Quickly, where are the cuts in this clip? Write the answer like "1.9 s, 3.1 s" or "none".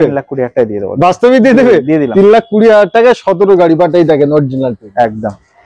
none